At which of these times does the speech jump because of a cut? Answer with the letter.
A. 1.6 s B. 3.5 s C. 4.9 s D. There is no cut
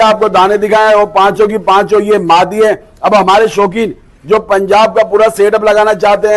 D